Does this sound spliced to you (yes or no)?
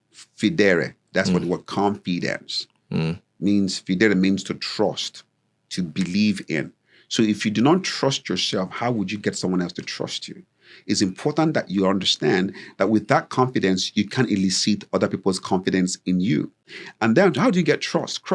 no